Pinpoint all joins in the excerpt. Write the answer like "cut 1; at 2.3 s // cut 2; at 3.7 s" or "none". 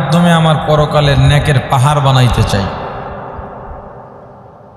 none